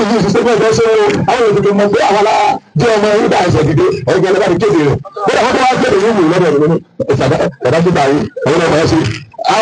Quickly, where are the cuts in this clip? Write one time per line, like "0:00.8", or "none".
none